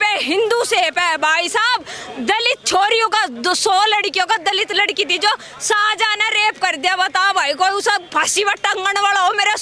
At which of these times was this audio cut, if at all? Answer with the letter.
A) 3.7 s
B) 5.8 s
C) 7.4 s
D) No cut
D